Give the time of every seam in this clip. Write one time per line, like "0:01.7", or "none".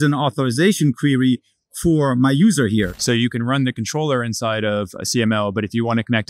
0:02.9

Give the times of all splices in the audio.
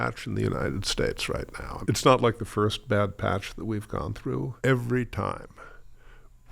0:01.7
0:04.5

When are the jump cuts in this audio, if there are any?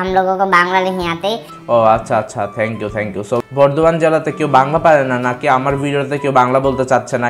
0:03.4

